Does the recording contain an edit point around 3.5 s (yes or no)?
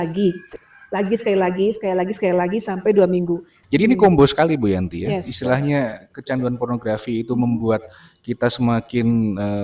yes